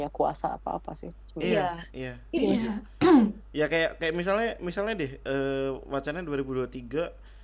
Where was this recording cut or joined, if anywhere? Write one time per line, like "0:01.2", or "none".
none